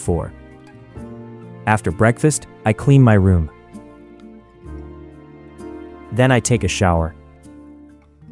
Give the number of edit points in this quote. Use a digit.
3